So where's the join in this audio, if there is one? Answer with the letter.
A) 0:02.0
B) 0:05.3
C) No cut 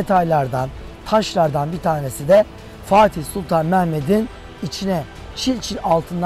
C